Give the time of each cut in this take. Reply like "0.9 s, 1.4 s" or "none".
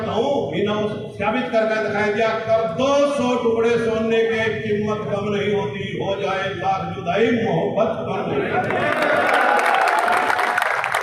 none